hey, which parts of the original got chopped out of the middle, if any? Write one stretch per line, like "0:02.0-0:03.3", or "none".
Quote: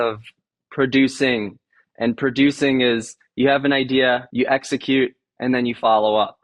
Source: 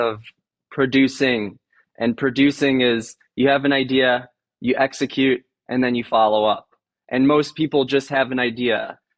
0:04.3-0:04.6